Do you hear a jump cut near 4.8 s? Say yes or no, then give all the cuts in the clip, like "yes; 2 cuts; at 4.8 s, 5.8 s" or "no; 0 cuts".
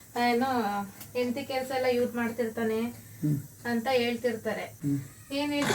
yes; 1 cut; at 4.8 s